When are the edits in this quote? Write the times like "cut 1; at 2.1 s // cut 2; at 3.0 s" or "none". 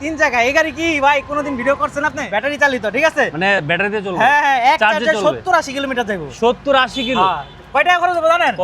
cut 1; at 2.2 s

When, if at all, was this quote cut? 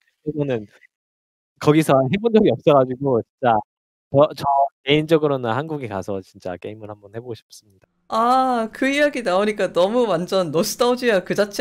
none

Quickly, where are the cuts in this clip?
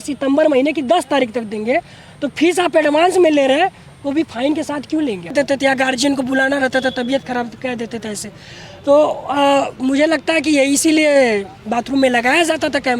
cut 1; at 5.3 s

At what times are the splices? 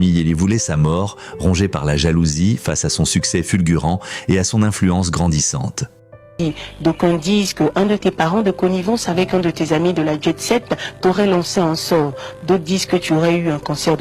cut 1; at 6.3 s

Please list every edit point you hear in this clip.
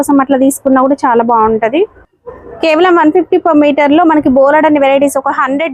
none

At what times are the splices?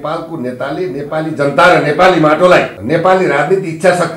cut 1; at 2.8 s

